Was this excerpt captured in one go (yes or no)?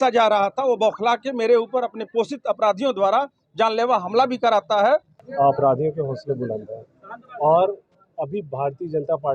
no